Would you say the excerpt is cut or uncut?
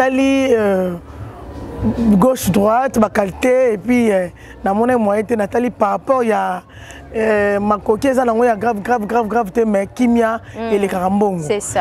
uncut